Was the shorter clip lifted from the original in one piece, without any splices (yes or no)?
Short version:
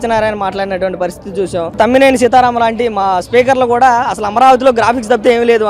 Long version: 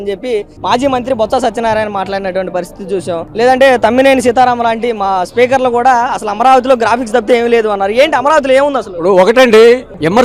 no